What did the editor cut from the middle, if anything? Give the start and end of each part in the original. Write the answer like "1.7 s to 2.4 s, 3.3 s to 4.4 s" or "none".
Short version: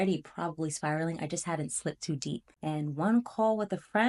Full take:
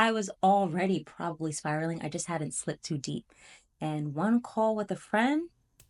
3.3 s to 3.7 s